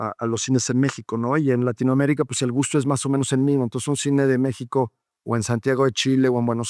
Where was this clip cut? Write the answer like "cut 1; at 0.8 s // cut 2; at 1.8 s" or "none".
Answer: none